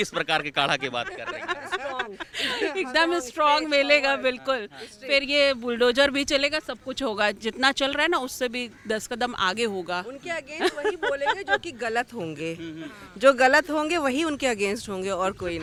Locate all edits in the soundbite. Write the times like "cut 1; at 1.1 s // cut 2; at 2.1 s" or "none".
none